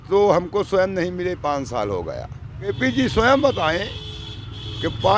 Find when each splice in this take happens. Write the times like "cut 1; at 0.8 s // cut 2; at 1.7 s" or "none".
cut 1; at 2.7 s

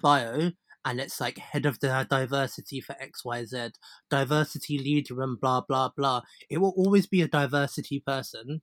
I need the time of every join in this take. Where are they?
none

